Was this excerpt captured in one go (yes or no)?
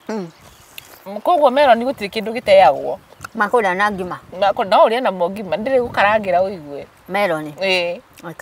yes